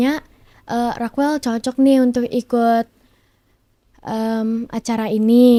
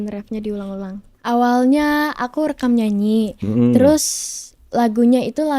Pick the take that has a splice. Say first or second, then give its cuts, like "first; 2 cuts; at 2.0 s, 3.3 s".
second; 1 cut; at 1.1 s